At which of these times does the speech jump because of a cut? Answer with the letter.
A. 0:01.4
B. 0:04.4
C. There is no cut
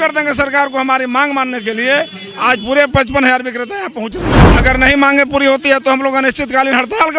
B